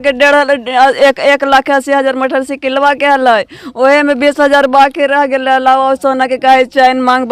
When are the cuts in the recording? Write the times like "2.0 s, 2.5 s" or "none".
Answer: none